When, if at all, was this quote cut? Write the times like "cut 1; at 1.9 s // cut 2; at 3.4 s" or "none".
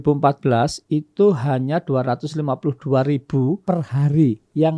cut 1; at 3.6 s